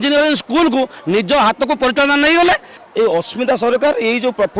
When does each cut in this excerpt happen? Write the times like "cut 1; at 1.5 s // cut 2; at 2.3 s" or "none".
cut 1; at 2.7 s

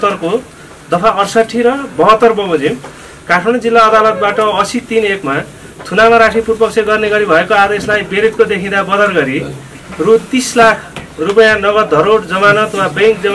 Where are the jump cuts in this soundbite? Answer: none

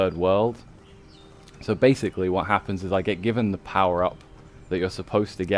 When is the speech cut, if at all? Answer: none

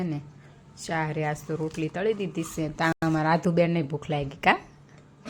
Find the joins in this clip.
none

